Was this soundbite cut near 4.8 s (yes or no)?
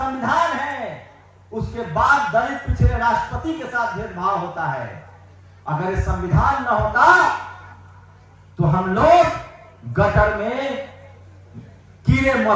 no